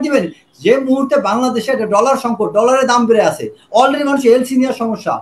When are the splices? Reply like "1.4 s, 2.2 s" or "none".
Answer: none